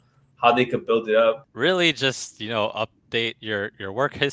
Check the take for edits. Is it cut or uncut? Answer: cut